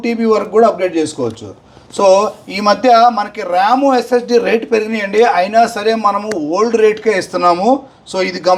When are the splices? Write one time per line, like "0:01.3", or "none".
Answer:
none